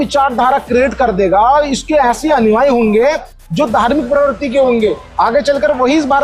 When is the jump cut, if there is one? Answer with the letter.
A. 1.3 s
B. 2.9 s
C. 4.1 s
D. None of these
D